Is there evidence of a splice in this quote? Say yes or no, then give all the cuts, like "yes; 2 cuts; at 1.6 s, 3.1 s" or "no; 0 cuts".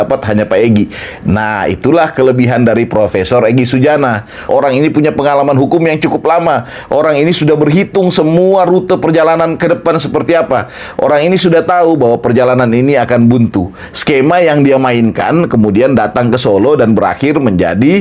no; 0 cuts